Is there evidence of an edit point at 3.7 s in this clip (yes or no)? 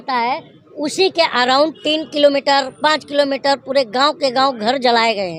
no